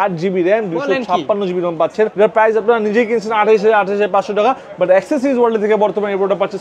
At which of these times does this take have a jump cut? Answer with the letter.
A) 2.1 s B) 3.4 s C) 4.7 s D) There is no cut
A